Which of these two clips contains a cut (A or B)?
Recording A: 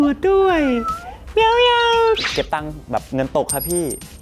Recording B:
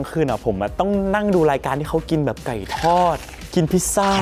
A